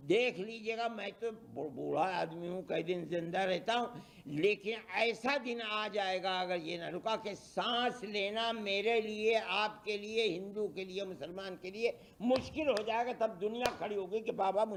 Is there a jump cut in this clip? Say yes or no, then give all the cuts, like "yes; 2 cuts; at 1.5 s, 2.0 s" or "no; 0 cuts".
no; 0 cuts